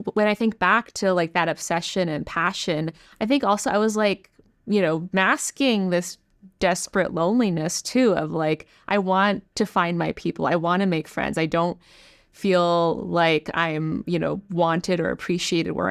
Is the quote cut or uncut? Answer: uncut